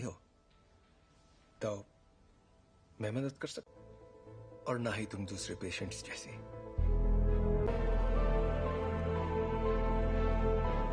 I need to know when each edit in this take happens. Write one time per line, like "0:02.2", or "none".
0:07.7